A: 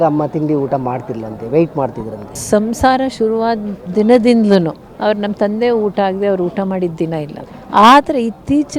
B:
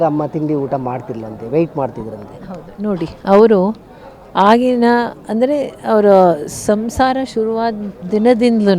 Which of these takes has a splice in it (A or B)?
A